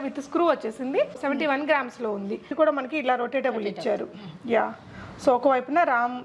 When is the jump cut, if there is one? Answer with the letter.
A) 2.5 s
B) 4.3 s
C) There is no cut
A